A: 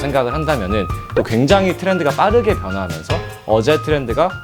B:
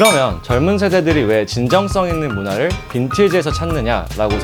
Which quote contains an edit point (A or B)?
A